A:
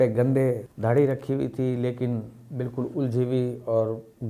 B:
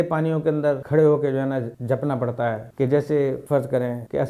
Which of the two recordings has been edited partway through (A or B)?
B